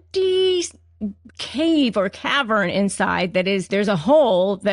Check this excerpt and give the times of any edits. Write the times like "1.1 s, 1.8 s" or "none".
3.7 s